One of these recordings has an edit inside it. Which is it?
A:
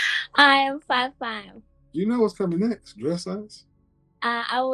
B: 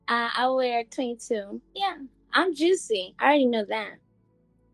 B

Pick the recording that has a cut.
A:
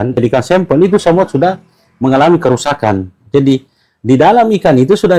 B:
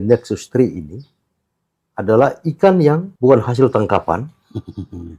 B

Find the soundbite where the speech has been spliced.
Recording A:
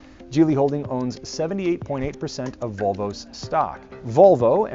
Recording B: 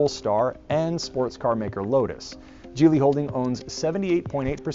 B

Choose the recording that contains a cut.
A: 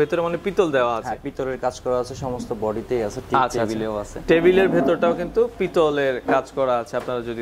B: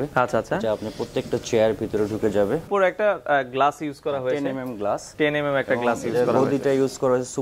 B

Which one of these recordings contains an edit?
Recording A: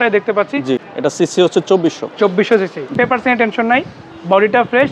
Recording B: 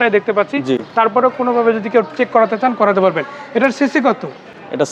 A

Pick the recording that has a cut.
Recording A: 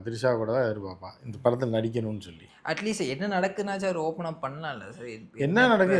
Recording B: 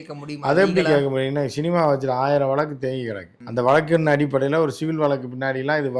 A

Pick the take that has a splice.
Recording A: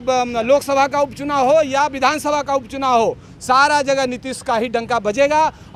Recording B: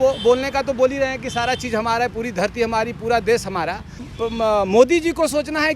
B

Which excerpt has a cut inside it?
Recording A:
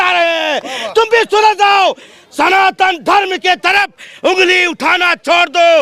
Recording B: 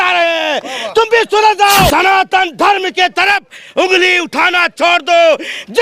B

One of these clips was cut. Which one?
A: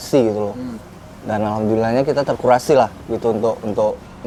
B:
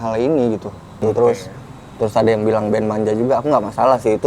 B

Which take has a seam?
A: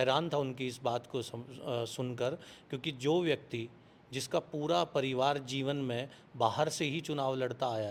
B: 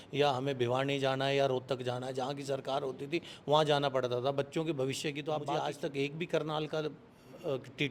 B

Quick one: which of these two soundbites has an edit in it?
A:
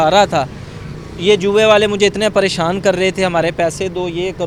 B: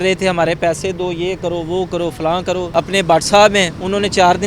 B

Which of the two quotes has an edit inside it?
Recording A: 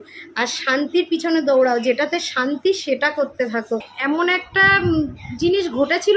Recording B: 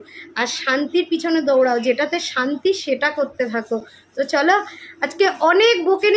A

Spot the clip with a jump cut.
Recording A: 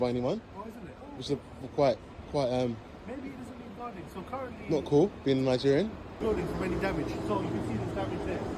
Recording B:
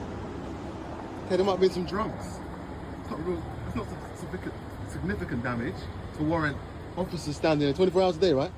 A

